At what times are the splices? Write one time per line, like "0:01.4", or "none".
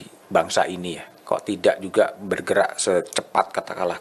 none